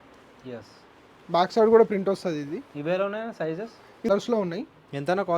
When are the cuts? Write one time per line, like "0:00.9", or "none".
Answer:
0:04.1